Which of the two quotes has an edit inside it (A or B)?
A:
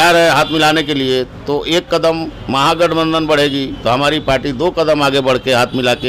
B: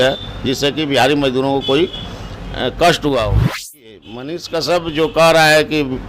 B